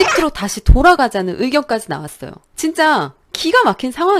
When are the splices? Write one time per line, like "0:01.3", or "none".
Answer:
none

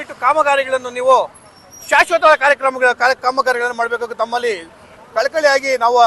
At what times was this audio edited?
none

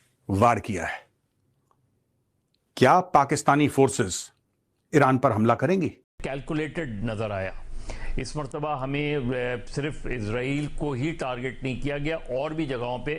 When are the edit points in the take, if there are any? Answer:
0:06.1

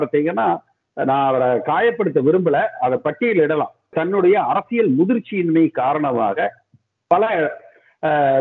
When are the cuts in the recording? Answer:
0:03.9

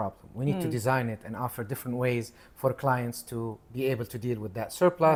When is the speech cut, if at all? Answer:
none

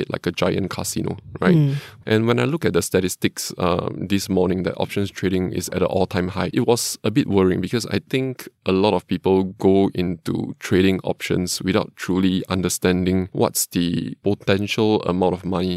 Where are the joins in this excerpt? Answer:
0:01.9
0:06.5
0:14.1

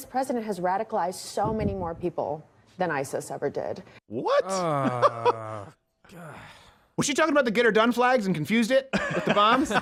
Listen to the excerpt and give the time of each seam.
none

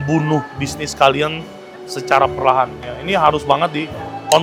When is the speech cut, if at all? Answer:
none

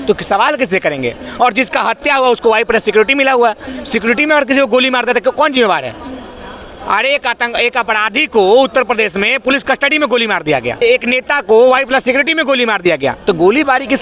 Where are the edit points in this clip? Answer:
none

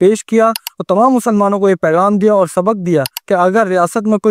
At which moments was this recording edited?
0:03.2

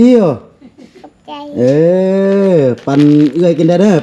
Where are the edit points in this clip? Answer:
none

